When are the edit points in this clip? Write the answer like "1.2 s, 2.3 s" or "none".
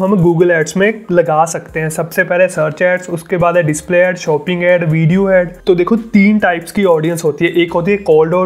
5.5 s